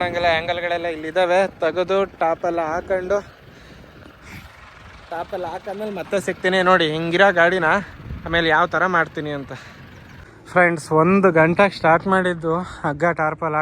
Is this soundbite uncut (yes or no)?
yes